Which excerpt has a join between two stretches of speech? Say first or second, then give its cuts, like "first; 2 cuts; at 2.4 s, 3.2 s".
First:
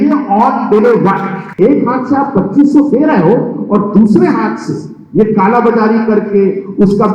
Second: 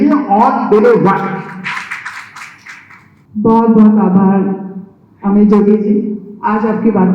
first; 1 cut; at 1.5 s